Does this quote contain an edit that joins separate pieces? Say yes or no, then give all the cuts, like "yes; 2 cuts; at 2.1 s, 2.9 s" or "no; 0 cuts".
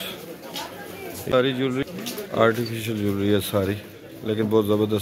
yes; 1 cut; at 1.3 s